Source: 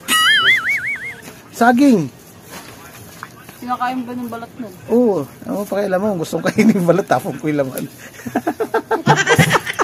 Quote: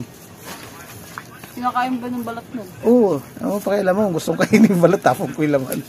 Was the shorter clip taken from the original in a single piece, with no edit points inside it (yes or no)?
yes